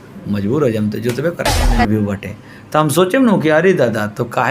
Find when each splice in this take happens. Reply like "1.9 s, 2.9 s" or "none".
1.8 s